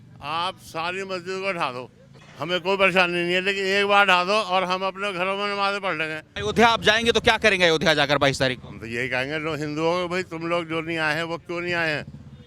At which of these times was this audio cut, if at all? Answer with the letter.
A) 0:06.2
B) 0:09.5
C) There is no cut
A